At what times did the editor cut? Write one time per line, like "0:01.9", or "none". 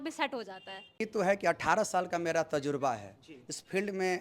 0:01.0